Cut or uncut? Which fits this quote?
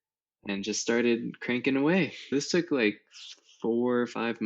cut